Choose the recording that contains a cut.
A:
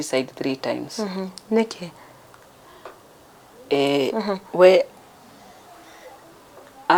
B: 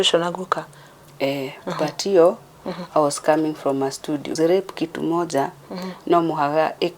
B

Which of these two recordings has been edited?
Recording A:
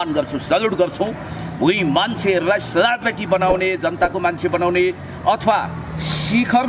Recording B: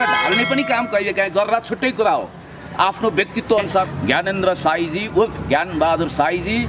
B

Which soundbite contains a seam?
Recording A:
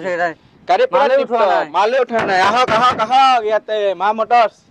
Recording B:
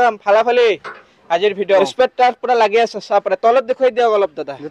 B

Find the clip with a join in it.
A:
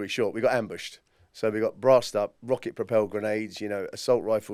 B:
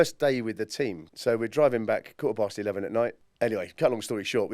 B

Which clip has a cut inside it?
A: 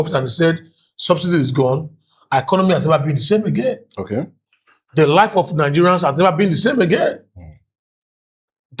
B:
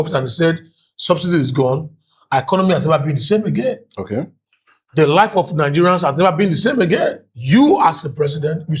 B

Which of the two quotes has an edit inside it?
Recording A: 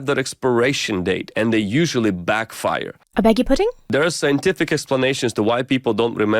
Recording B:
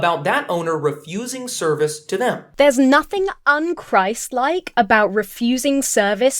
A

